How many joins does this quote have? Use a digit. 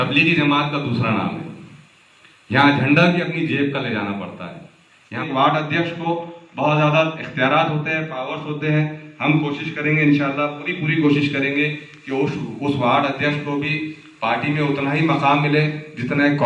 1